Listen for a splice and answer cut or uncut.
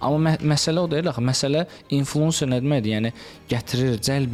uncut